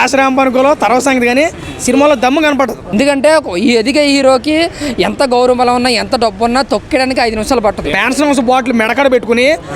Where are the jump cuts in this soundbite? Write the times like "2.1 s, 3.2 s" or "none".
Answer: 2.8 s, 8.0 s